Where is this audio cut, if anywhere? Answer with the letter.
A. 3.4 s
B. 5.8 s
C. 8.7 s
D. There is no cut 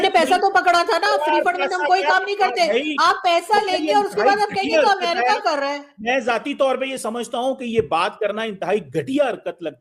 D